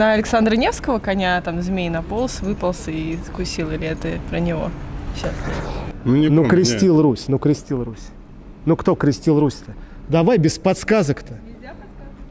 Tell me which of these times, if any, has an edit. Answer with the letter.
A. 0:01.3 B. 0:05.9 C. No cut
B